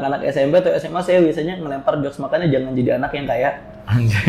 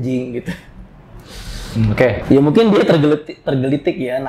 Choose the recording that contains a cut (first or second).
second